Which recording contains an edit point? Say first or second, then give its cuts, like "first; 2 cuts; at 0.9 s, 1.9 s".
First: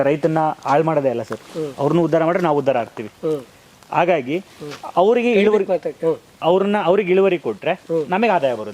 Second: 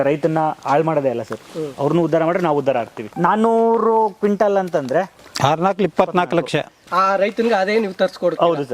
second; 3 cuts; at 3.1 s, 5.2 s, 6.8 s